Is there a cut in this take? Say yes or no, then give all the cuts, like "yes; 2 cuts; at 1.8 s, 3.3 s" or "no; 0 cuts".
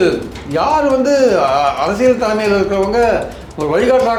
no; 0 cuts